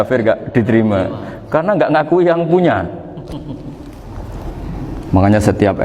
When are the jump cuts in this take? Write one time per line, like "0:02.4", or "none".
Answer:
0:04.7